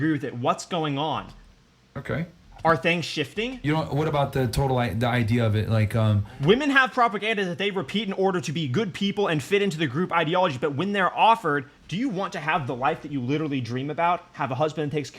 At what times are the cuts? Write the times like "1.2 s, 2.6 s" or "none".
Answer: none